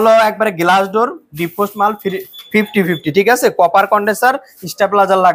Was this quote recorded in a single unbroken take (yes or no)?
yes